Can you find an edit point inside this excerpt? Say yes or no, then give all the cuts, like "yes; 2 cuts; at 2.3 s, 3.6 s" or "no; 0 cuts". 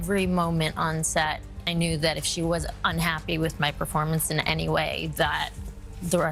no; 0 cuts